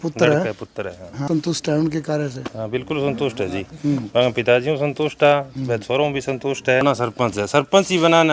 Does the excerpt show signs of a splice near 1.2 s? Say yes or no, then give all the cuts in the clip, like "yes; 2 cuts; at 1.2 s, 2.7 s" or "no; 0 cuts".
yes; 2 cuts; at 1.2 s, 6.8 s